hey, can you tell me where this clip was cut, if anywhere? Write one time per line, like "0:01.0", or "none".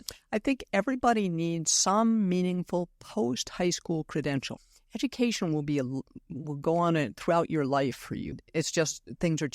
0:04.6
0:08.4